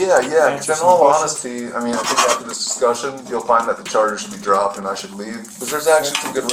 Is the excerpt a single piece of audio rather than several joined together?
no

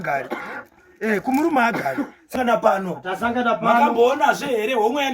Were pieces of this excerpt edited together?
yes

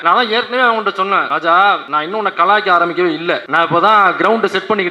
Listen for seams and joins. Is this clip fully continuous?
no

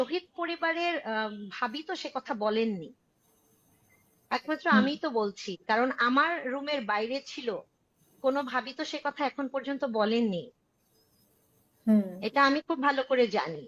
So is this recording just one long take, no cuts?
yes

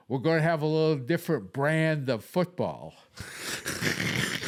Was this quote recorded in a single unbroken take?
yes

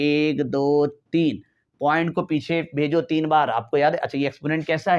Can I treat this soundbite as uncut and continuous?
yes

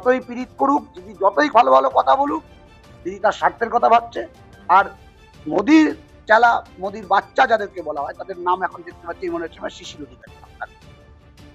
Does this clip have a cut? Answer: no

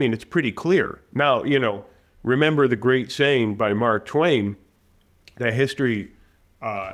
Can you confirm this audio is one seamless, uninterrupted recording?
yes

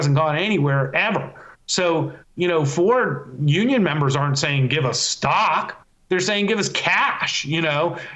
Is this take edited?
no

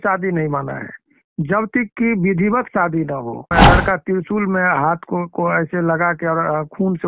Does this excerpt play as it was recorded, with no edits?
no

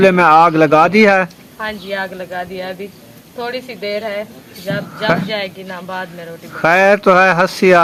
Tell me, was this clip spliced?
no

